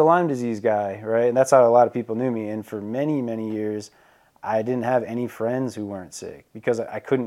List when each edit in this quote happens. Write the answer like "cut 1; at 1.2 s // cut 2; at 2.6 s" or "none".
none